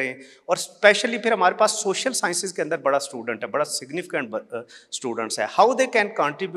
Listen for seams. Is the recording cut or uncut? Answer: uncut